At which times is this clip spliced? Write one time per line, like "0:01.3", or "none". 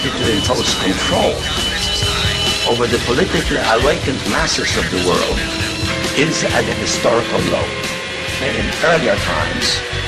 0:01.1